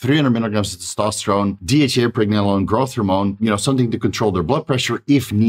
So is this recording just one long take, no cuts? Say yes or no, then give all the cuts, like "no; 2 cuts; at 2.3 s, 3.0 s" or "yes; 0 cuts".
no; 2 cuts; at 1.6 s, 3.4 s